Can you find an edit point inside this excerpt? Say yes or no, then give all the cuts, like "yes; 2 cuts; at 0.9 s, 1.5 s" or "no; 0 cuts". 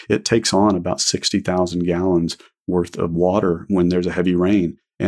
no; 0 cuts